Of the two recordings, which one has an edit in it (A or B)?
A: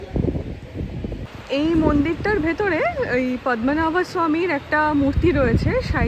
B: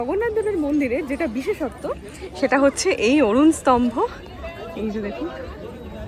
A